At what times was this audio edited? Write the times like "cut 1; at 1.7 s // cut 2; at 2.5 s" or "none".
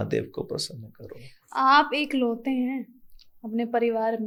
none